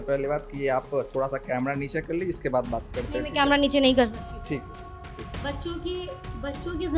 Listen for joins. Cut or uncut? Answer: uncut